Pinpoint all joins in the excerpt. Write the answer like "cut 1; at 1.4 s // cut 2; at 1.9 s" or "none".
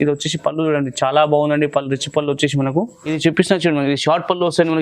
cut 1; at 3.1 s